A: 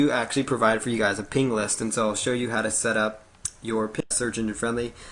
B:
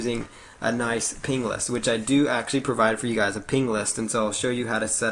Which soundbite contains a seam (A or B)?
A